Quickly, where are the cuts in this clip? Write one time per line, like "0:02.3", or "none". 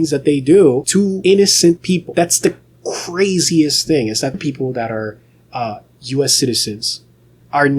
0:01.0
0:01.8
0:04.3